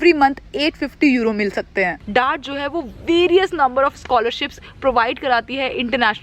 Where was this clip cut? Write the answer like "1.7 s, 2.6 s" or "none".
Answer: 2.0 s